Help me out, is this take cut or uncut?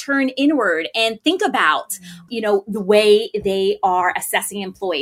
cut